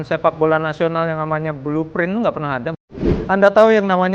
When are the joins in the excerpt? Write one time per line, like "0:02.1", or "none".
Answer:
0:02.8